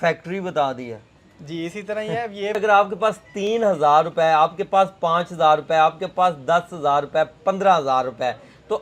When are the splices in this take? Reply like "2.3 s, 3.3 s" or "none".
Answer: 2.5 s

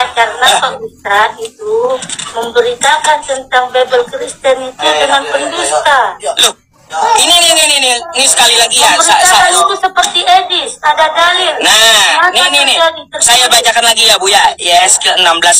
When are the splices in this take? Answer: 11.9 s

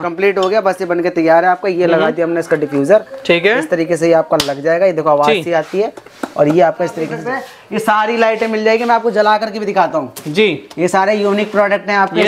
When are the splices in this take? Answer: 7.1 s

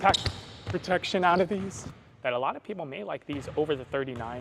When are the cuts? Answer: 1.9 s

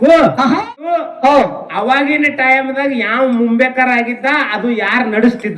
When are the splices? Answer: 1.1 s

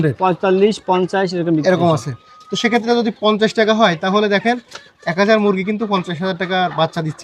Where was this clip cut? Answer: none

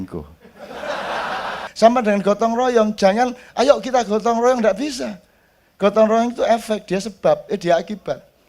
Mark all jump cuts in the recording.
1.7 s

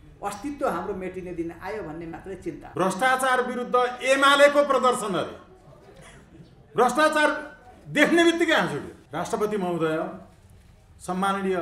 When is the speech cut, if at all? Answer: 2.6 s, 9.0 s

